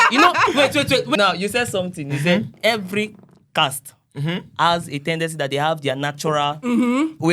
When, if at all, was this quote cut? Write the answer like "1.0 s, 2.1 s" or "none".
1.1 s